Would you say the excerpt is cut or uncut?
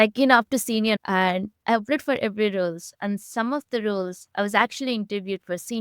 cut